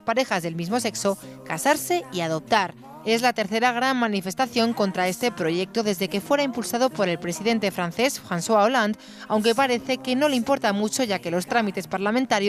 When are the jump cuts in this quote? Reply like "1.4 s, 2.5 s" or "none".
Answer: 7.1 s